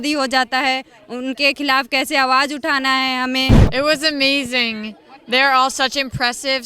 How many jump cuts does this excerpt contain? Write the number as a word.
one